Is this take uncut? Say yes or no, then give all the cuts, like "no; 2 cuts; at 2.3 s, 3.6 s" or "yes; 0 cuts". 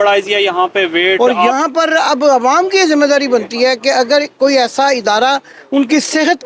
no; 1 cut; at 1.2 s